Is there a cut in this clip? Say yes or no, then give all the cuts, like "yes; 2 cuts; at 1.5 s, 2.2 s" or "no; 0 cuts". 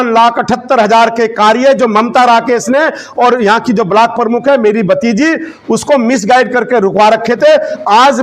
no; 0 cuts